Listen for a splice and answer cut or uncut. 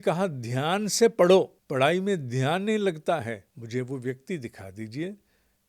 cut